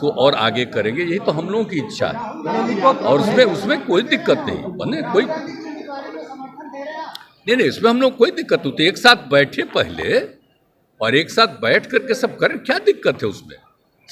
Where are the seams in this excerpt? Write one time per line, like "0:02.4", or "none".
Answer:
none